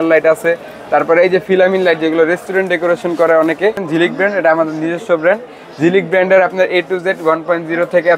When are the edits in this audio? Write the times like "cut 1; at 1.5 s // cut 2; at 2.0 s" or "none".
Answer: cut 1; at 3.8 s